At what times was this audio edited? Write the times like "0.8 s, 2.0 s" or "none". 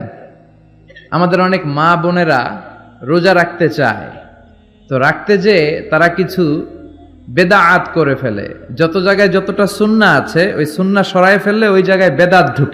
none